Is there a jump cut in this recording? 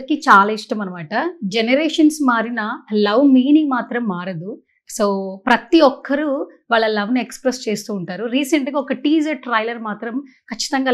no; 0 cuts

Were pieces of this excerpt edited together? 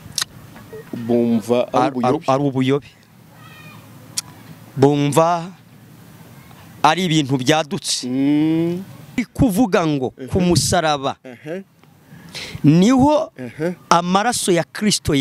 yes; 1 cut; at 9.2 s

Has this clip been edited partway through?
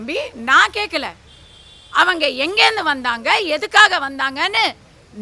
no; 0 cuts

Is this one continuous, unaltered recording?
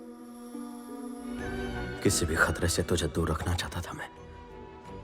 no; 1 cut; at 1.6 s

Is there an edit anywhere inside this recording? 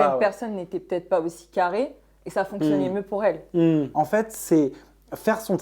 yes; 1 cut; at 3.9 s

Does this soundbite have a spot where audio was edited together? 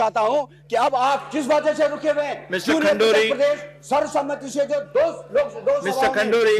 no; 0 cuts

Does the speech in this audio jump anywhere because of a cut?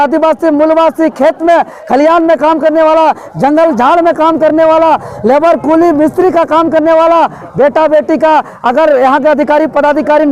no; 0 cuts

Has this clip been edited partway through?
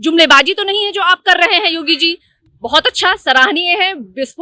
no; 0 cuts

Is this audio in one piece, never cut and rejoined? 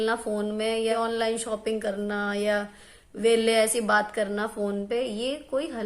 no; 1 cut; at 0.9 s

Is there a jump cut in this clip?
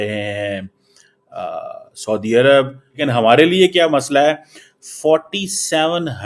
yes; 1 cut; at 3.0 s

